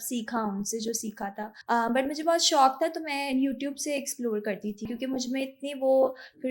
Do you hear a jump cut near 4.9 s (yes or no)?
yes